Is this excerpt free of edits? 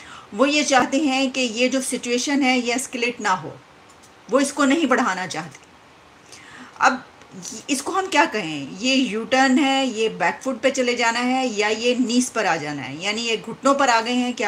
yes; 0 cuts

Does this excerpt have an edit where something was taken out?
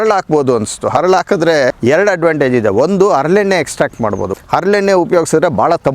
yes; 2 cuts; at 1.7 s, 4.3 s

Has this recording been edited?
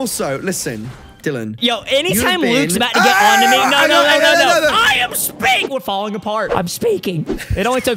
yes; 2 cuts; at 1.4 s, 6.5 s

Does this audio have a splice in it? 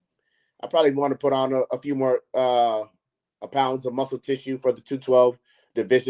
no; 0 cuts

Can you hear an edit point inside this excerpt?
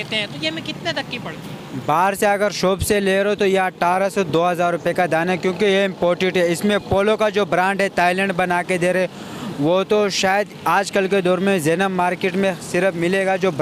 no; 0 cuts

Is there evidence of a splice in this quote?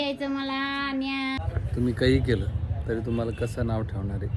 yes; 1 cut; at 1.4 s

